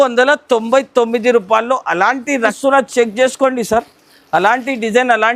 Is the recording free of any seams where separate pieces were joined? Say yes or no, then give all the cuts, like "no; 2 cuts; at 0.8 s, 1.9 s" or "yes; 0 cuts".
no; 1 cut; at 2.5 s